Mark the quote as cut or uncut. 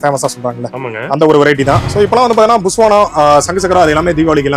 cut